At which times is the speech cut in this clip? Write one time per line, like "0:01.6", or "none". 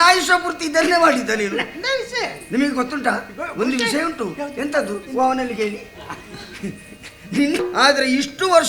0:07.6